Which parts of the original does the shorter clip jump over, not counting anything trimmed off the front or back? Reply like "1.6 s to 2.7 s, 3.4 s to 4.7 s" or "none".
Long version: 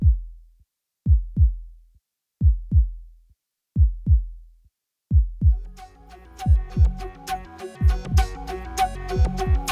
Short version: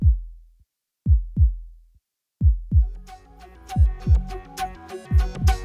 2.8 s to 5.5 s